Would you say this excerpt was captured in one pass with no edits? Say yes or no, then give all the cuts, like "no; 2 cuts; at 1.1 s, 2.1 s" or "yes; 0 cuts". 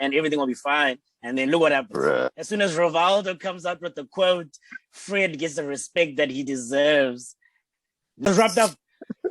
no; 1 cut; at 8.3 s